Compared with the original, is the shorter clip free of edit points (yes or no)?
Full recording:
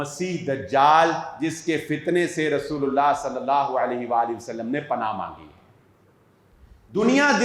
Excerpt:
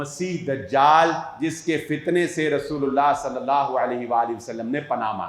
yes